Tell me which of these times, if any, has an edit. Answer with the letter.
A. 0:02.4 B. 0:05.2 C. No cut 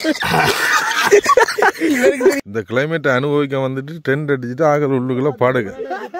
A